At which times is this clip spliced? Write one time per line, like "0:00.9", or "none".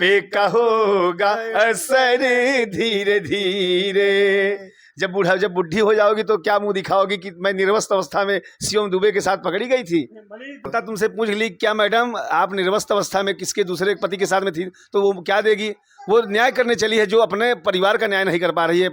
0:10.6